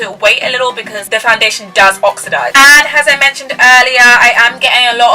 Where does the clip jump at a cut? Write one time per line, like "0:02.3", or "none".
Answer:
0:00.9
0:02.5